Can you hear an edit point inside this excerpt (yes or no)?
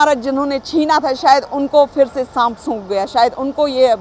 no